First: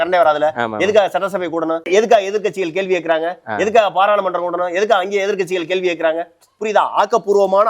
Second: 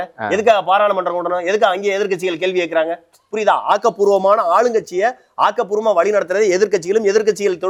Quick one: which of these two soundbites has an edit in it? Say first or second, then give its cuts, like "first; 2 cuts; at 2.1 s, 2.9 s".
first; 1 cut; at 1.9 s